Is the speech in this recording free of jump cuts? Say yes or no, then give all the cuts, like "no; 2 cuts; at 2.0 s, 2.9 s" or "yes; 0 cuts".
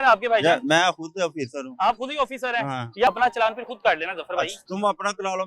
no; 1 cut; at 3.1 s